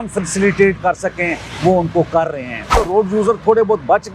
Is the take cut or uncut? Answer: cut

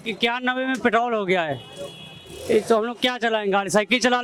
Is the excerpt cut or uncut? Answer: uncut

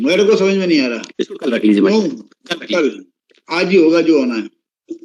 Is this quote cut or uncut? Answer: uncut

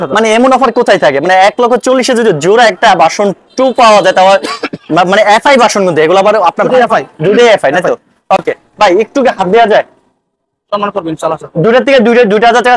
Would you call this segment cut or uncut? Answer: uncut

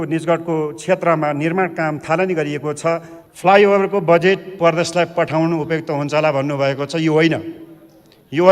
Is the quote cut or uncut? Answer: cut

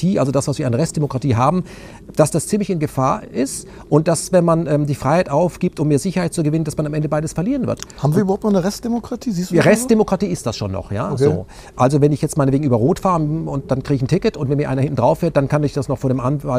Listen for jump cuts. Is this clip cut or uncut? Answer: uncut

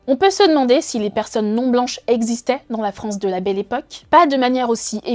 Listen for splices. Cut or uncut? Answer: cut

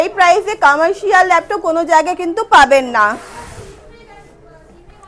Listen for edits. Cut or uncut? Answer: uncut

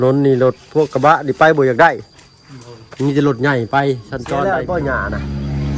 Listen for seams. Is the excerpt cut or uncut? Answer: cut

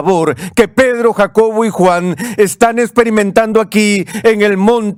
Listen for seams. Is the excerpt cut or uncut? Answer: uncut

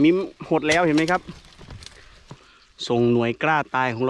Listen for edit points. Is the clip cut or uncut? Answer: cut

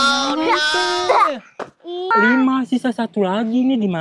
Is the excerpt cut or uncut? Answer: cut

